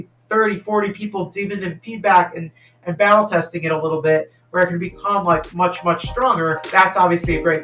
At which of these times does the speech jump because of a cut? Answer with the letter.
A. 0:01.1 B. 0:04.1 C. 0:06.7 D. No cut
C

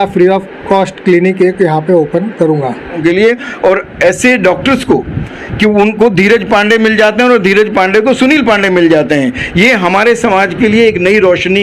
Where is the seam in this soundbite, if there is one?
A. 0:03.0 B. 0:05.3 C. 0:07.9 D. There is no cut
A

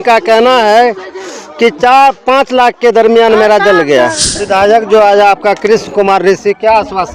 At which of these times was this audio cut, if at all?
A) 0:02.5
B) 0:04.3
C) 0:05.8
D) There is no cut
B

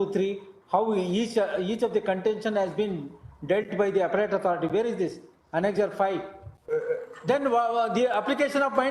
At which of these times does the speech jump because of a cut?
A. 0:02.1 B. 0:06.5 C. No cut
B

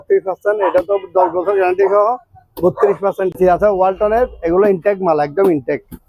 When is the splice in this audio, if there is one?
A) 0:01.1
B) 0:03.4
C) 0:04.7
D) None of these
B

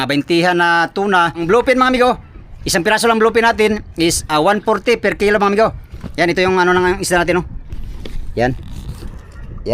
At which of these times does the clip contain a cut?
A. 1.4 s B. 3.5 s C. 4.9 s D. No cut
A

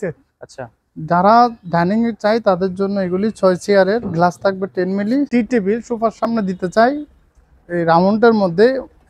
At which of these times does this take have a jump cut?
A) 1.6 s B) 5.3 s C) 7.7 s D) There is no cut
B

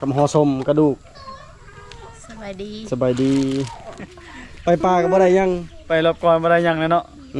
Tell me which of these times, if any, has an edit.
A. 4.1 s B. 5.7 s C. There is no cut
A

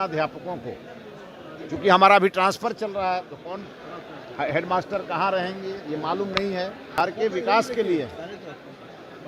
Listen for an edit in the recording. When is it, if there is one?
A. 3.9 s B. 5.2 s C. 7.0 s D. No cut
C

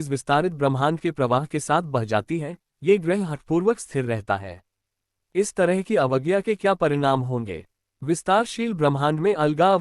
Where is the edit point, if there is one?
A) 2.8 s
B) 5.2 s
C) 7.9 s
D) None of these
C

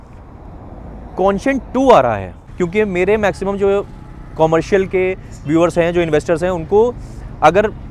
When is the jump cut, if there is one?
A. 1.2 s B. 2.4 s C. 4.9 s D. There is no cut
B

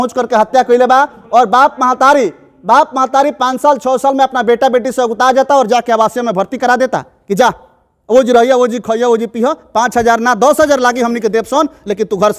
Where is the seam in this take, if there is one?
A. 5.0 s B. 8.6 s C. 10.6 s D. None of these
D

